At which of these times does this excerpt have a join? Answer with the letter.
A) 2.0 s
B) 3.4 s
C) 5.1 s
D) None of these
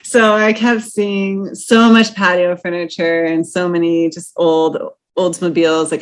D